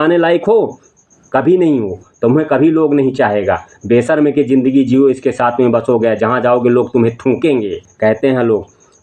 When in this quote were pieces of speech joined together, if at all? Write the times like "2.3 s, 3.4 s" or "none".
7.9 s